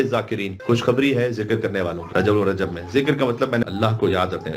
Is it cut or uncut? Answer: cut